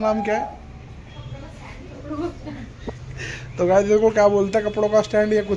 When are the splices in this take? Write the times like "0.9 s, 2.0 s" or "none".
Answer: none